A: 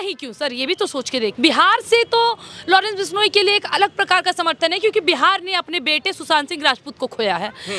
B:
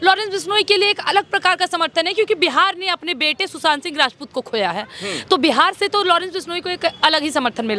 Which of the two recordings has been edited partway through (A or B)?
A